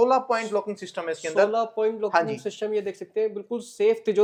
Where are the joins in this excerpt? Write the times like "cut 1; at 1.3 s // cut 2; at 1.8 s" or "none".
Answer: none